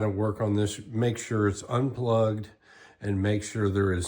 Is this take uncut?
yes; 0 cuts

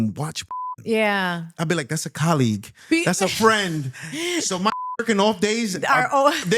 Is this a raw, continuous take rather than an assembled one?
yes; 0 cuts

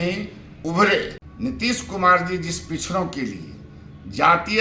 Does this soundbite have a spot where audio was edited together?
yes; 1 cut; at 1.2 s

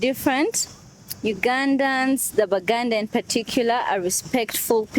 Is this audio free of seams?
yes; 0 cuts

